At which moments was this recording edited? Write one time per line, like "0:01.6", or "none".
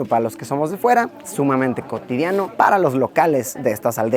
none